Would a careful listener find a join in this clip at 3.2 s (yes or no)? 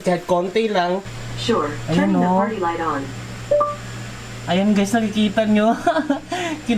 no